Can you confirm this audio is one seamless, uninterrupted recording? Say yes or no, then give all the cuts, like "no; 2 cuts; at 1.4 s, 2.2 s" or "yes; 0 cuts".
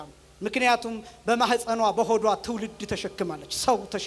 yes; 0 cuts